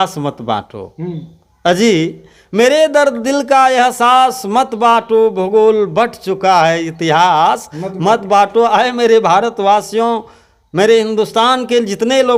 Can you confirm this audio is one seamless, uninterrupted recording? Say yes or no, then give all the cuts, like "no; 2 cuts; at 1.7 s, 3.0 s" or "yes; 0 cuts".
yes; 0 cuts